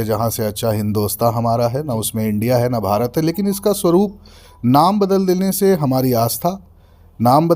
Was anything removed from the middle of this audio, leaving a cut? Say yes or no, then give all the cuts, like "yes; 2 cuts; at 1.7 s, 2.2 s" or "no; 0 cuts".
no; 0 cuts